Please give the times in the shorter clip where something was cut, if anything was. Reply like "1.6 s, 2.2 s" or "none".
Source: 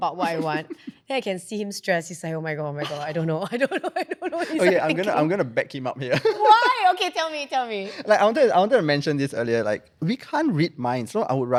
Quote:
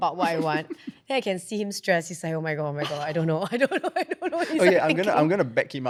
none